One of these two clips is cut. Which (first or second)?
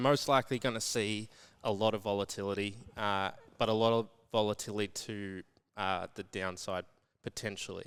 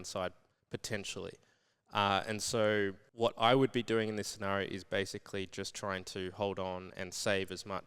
second